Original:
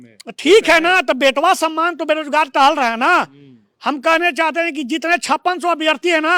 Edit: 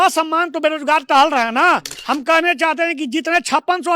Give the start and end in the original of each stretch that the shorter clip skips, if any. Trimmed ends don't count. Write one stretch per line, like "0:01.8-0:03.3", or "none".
0:03.4-0:03.7